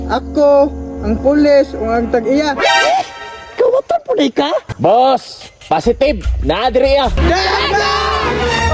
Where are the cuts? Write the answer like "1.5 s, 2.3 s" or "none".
4.6 s, 7.2 s